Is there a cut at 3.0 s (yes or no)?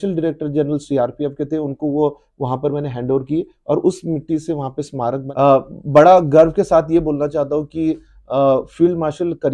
no